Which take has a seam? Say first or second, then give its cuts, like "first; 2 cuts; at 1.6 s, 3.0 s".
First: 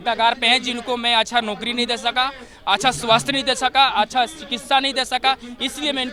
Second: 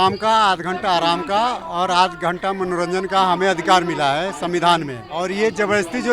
second; 1 cut; at 5.0 s